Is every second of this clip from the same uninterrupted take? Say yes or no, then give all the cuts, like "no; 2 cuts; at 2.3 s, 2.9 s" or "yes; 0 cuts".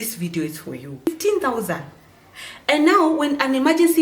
no; 1 cut; at 1.1 s